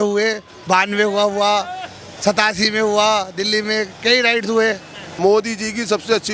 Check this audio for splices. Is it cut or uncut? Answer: cut